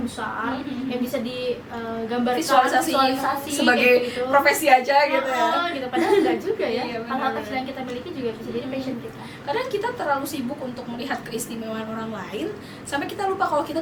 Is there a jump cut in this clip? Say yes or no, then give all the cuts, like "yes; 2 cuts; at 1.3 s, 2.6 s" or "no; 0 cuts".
no; 0 cuts